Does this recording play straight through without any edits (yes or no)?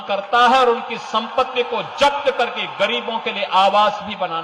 yes